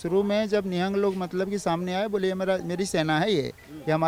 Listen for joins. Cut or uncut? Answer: uncut